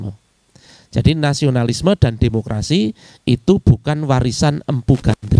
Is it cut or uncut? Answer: uncut